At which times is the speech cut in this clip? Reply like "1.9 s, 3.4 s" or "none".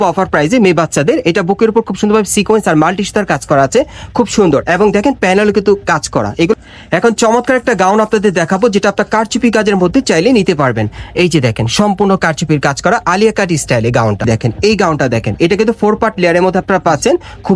6.5 s, 14.3 s